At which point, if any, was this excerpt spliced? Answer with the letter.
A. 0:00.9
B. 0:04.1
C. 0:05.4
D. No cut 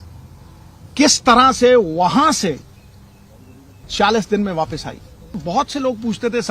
C